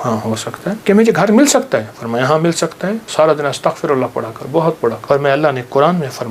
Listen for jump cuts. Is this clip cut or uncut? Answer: cut